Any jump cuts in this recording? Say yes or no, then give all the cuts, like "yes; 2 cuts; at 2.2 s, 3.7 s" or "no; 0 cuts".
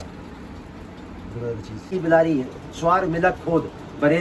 yes; 1 cut; at 1.9 s